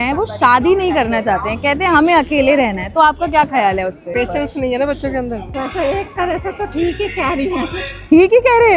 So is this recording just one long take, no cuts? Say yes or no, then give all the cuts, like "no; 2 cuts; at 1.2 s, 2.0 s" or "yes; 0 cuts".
yes; 0 cuts